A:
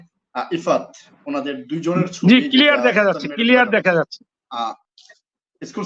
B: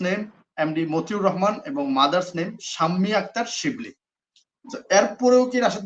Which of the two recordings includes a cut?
A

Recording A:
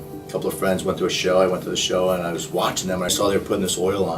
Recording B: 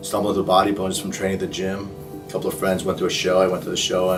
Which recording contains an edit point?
A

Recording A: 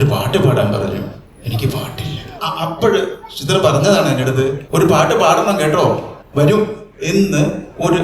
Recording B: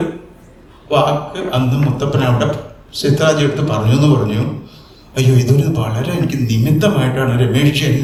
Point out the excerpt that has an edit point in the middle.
A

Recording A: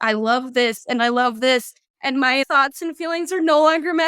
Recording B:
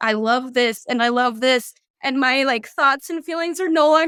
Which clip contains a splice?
A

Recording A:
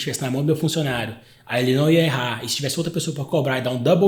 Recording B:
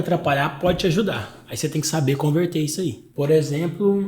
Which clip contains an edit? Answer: B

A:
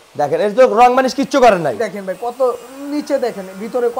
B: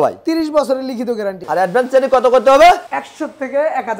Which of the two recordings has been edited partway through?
B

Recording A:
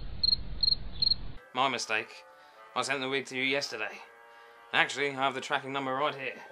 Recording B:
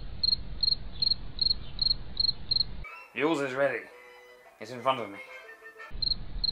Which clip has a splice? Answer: A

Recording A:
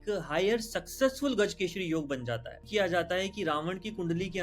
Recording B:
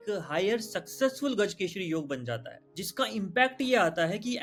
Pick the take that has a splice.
A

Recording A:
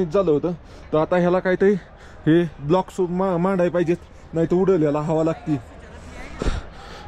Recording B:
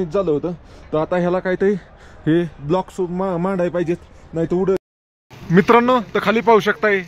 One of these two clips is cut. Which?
B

